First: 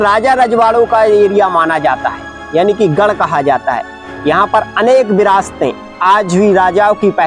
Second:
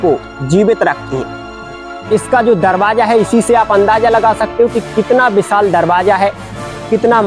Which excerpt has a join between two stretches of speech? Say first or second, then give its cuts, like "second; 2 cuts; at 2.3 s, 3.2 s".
second; 1 cut; at 1.7 s